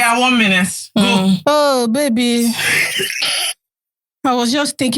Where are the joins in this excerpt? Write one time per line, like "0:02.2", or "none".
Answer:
0:01.4